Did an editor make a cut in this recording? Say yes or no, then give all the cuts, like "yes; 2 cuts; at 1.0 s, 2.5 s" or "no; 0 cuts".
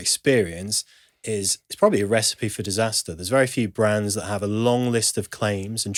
no; 0 cuts